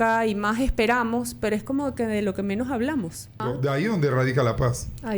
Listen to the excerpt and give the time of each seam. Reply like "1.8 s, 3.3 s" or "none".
3.4 s

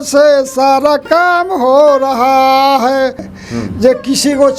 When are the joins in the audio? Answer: 3.3 s

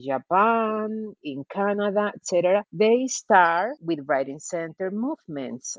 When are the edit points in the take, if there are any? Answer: 2.7 s, 3.8 s

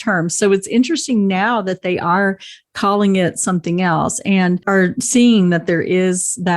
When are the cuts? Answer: 4.6 s

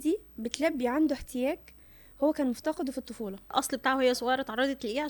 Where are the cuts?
3.5 s

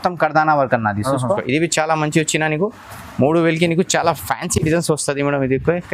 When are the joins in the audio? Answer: 1.4 s

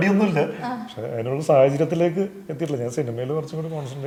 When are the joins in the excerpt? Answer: none

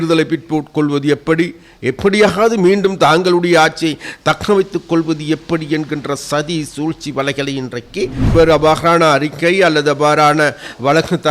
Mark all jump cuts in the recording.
8.3 s

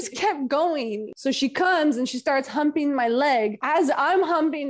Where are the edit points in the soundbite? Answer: 1.1 s

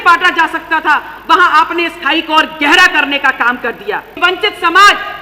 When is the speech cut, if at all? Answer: 4.2 s

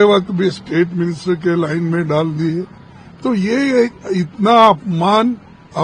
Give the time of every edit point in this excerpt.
none

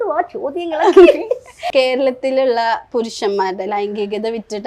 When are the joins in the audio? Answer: 1.5 s

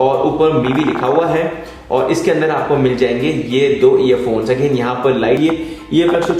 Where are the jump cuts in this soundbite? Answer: 5.4 s

